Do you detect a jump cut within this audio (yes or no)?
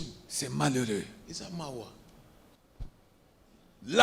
yes